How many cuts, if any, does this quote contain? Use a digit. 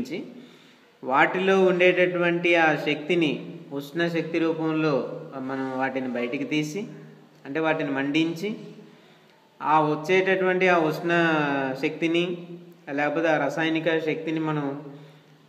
1